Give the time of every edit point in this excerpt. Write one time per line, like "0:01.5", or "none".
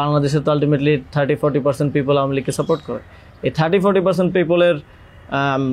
none